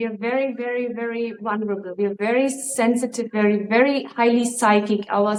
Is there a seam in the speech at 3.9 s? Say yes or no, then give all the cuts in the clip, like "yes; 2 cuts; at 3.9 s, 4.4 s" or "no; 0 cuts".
no; 0 cuts